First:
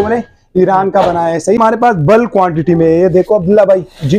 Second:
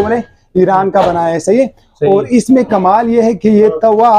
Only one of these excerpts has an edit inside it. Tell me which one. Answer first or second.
first